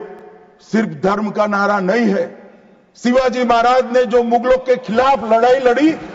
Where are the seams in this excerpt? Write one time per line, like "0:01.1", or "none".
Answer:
none